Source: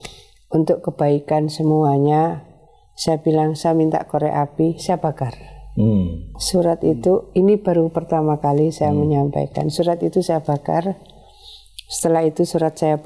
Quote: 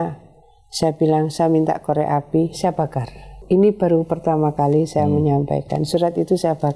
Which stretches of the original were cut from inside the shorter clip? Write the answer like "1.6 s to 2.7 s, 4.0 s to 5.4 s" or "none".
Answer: 5.7 s to 7.3 s